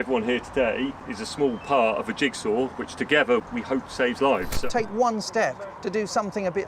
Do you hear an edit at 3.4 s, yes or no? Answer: yes